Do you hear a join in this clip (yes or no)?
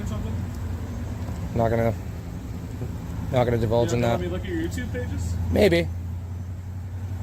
no